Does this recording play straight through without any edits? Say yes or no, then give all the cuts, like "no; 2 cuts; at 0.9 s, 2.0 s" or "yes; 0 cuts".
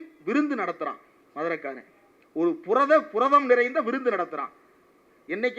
yes; 0 cuts